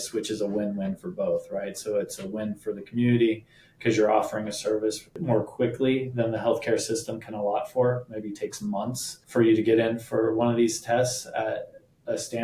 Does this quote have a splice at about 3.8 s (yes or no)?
no